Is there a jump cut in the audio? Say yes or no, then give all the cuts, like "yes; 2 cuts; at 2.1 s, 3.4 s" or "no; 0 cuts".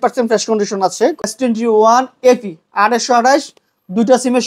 yes; 1 cut; at 1.3 s